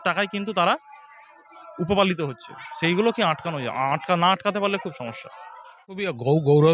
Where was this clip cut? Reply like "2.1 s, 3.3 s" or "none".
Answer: 5.5 s